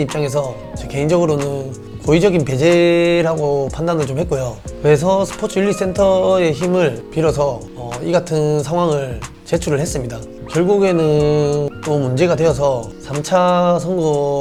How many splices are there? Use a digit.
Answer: 0